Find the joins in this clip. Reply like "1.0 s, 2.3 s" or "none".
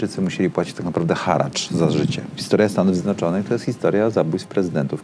2.3 s